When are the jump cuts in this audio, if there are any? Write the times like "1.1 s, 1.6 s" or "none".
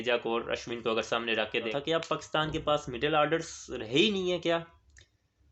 1.7 s